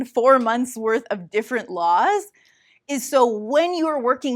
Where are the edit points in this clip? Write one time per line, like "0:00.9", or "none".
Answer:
none